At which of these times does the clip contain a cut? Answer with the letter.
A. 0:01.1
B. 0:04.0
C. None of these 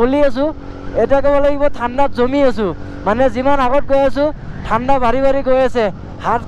C